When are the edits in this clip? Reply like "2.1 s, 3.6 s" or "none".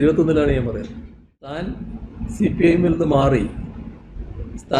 1.5 s